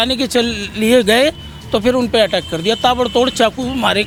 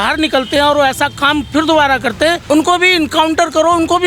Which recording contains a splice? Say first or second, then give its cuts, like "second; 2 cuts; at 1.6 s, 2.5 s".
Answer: second; 1 cut; at 2.4 s